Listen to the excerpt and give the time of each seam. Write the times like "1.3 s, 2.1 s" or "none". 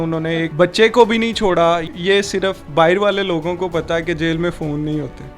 1.9 s

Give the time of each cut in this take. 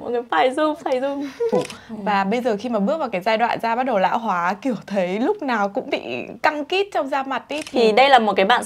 1.7 s, 7.6 s

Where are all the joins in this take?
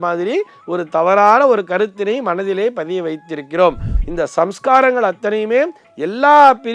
3.9 s

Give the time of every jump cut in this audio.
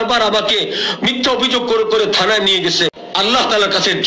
3.0 s

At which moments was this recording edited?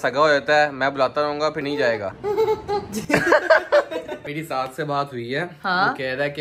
1.8 s, 4.4 s

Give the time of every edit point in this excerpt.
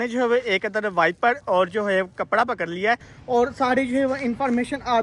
3.1 s

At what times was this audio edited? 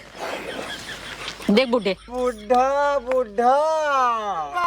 2.1 s

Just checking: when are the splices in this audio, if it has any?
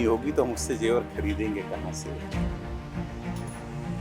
none

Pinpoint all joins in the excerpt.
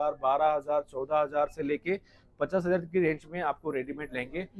none

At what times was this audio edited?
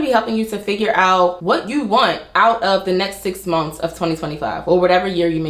1.4 s

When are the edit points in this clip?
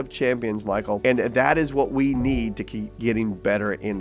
1.0 s

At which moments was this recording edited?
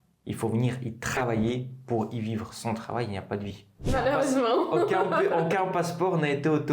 3.9 s

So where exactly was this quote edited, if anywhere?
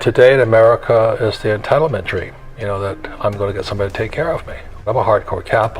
4.9 s

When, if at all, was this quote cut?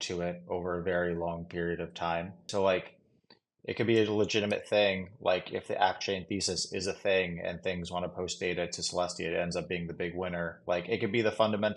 2.5 s

